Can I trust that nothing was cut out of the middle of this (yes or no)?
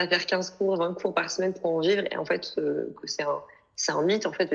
yes